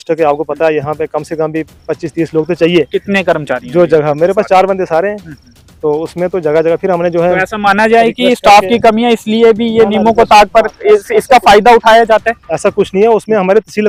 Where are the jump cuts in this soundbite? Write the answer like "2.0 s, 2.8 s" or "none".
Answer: none